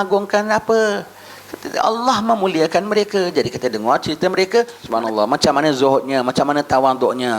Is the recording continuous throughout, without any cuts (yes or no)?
no